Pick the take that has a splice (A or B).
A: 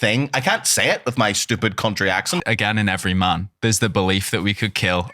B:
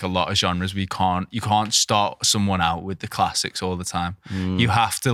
A